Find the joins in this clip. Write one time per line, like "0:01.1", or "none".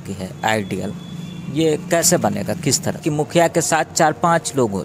0:03.0